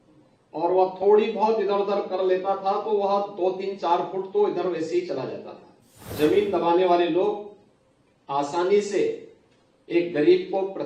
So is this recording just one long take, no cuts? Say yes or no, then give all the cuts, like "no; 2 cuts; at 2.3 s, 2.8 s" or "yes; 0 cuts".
no; 1 cut; at 6.0 s